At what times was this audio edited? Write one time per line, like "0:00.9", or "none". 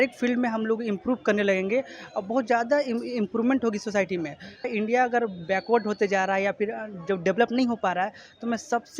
0:04.7

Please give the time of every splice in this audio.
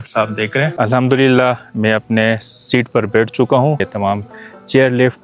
0:00.7
0:03.9

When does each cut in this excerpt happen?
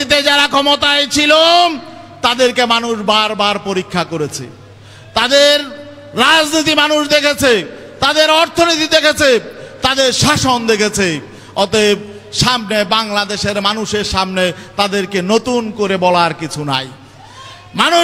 none

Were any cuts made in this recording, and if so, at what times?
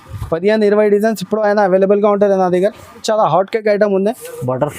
0:03.0

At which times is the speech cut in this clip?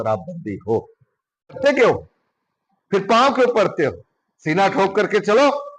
0:01.5

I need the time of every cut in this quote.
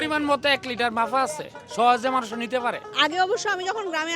0:02.9

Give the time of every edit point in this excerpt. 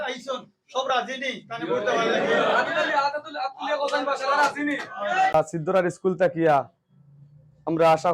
0:05.3

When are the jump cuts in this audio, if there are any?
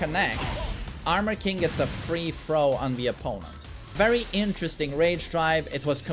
0:03.9

